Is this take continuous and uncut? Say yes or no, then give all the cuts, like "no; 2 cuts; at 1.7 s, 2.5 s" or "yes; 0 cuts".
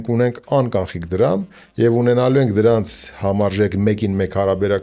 yes; 0 cuts